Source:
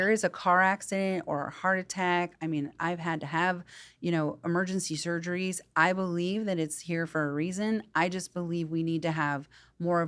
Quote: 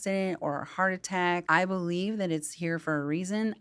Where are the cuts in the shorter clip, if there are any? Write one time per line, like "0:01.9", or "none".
0:01.4